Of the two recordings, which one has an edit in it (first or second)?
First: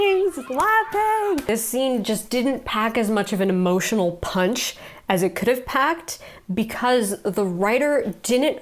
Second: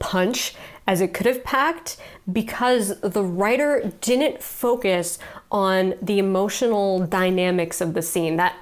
first